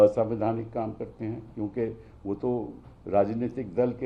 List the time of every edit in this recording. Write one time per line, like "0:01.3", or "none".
none

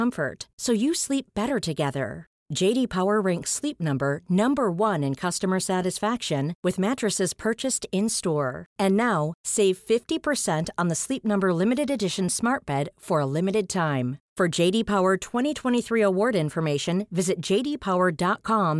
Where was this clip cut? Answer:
none

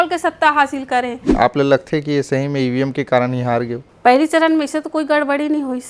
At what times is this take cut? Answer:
0:01.3
0:03.8

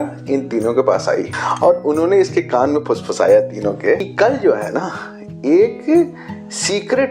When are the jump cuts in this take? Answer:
0:01.4
0:04.1

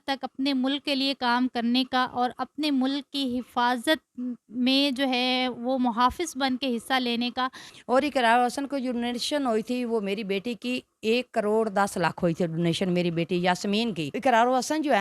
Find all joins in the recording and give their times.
0:07.6
0:14.2

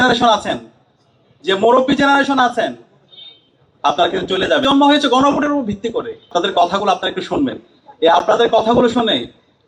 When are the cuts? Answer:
0:04.6
0:06.3

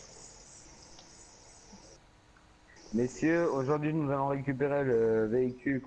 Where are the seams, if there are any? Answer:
0:04.7

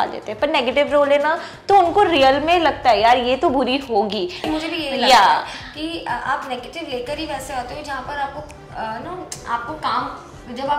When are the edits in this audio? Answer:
0:04.5

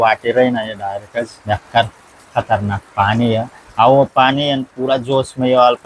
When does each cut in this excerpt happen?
0:01.4
0:03.6

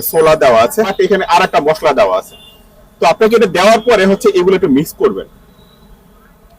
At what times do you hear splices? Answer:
0:00.9

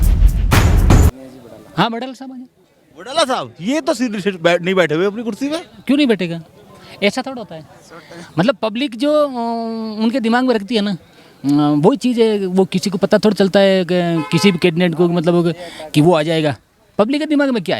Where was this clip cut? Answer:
0:01.1

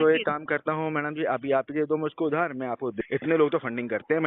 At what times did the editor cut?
0:02.9

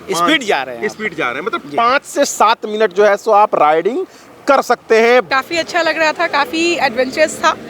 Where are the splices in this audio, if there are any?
0:05.3

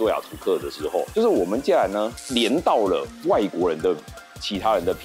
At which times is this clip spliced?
none

